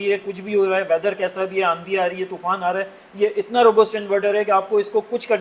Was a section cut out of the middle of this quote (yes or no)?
no